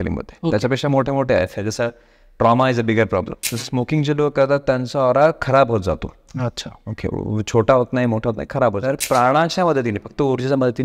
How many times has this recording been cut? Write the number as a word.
two